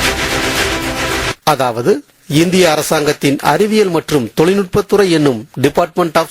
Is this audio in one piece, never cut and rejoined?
no; 1 cut; at 1.3 s

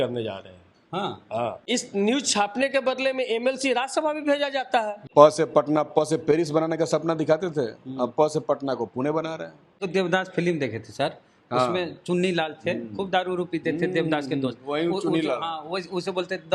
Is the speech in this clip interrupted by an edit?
yes; 3 cuts; at 1.6 s, 5.0 s, 9.8 s

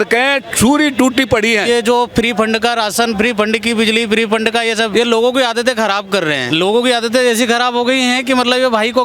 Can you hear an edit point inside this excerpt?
yes; 3 cuts; at 1.7 s, 4.9 s, 6.4 s

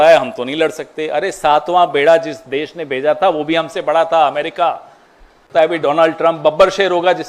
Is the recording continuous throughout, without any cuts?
no; 1 cut; at 5.4 s

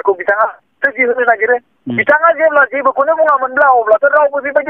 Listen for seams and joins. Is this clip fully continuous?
yes; 0 cuts

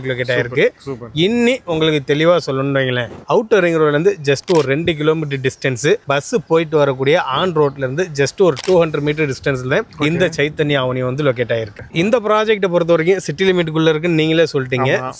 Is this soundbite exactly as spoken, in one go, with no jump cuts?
no; 1 cut; at 11.8 s

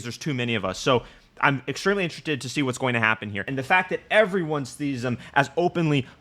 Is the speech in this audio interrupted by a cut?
yes; 1 cut; at 3.5 s

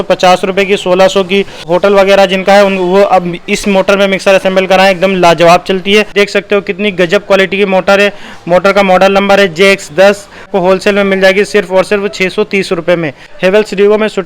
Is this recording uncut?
no; 4 cuts; at 1.6 s, 6.1 s, 10.5 s, 13.3 s

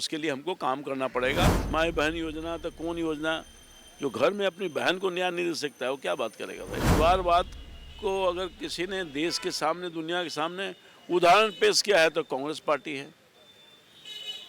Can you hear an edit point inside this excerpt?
yes; 2 cuts; at 1.5 s, 6.9 s

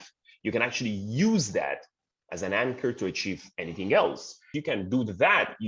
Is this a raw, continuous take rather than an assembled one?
no; 1 cut; at 4.5 s

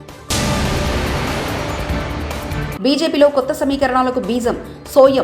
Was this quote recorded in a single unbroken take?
yes; 0 cuts

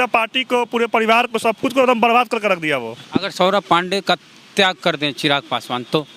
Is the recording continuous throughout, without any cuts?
no; 1 cut; at 3.0 s

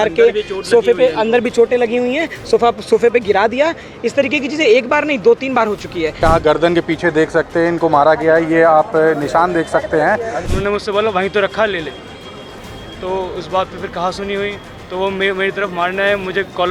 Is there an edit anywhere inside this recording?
yes; 2 cuts; at 6.2 s, 10.4 s

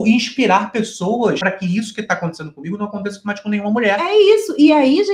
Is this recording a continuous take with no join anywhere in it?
no; 1 cut; at 1.4 s

